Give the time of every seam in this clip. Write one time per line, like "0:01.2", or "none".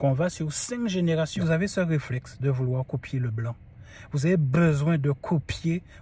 0:01.4